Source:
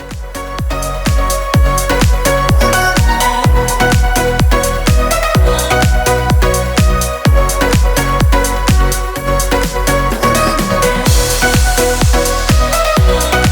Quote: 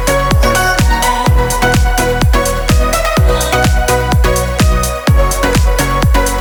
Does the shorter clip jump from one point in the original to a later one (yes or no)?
no